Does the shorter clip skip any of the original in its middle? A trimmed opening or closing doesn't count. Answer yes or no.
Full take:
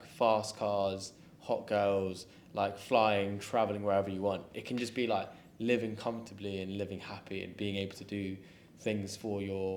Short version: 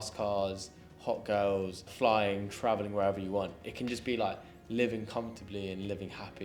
yes